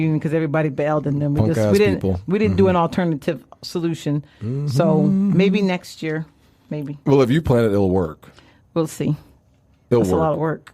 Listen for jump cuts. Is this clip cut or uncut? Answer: uncut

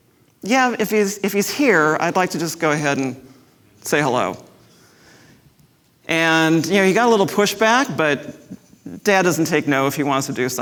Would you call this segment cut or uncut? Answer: uncut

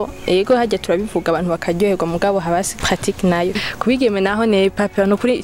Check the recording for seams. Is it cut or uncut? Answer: cut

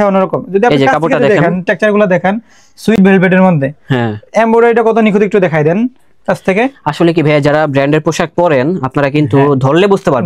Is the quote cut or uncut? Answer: uncut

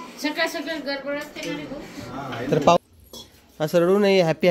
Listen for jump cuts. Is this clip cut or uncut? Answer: cut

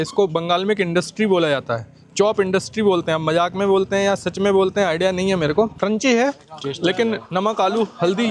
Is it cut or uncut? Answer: cut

